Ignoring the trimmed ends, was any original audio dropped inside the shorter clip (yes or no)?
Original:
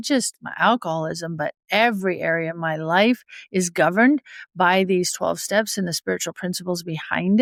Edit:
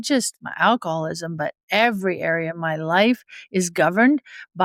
no